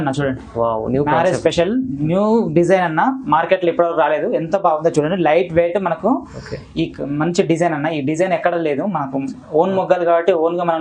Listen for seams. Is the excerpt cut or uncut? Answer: uncut